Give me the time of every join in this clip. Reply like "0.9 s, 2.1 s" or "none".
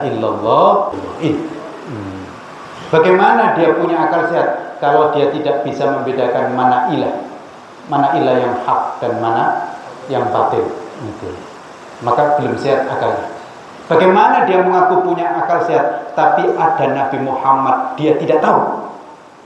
1.0 s